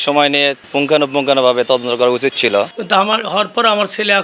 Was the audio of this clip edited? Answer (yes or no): yes